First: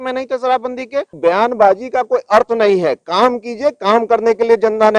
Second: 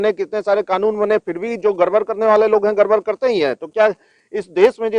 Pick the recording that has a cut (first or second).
first